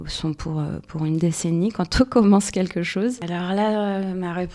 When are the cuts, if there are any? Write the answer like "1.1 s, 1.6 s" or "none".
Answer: 3.3 s